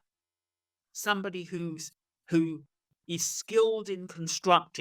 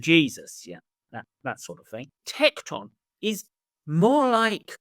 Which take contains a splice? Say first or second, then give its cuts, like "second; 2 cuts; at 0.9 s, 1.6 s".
second; 1 cut; at 2.2 s